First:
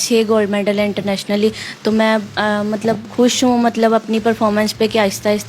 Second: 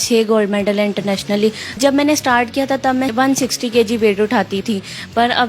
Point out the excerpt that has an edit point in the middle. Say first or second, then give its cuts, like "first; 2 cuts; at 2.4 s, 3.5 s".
second; 3 cuts; at 1.8 s, 3.1 s, 4.6 s